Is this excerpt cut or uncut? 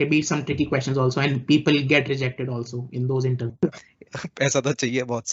cut